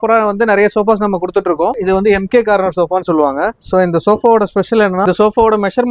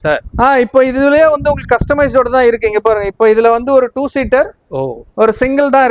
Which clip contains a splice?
first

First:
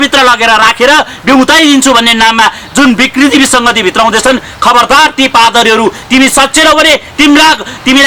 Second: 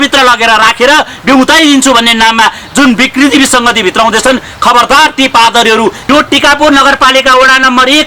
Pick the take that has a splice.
second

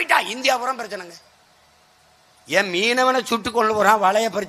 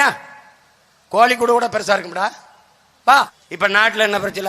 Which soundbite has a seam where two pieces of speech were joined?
second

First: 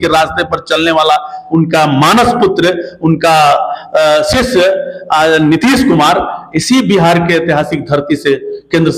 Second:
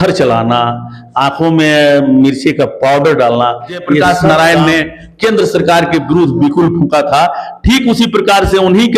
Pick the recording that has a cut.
second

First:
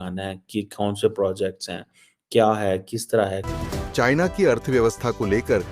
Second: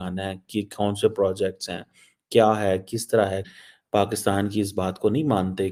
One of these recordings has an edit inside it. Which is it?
first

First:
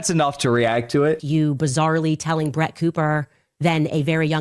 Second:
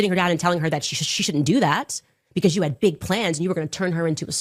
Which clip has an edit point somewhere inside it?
first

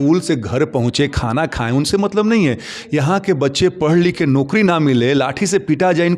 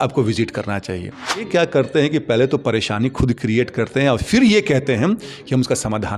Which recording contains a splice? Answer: second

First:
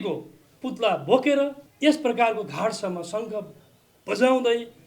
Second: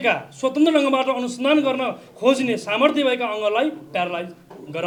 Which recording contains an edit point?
first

